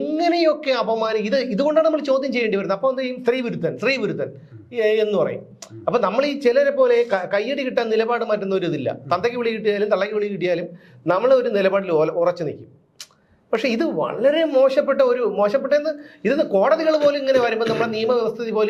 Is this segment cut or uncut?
uncut